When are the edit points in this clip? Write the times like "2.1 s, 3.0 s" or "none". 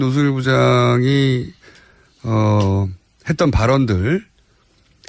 none